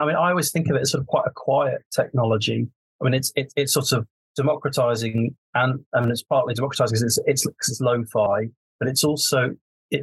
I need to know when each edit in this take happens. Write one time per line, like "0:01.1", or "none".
0:04.2
0:08.3